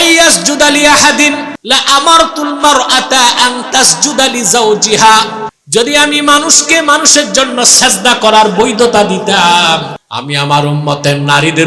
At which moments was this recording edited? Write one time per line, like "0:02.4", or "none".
0:01.5
0:05.5
0:10.0